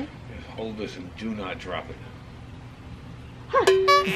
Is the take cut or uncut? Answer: uncut